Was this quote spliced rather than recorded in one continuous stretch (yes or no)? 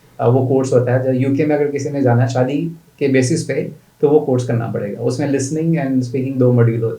no